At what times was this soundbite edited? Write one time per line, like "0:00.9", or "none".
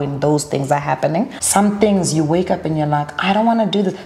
0:01.3